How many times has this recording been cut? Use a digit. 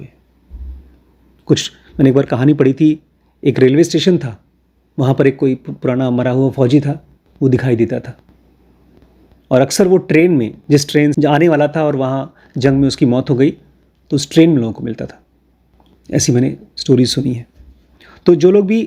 1